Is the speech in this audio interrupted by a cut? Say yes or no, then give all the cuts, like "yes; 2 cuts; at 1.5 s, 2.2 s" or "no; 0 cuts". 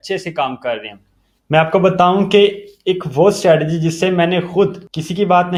no; 0 cuts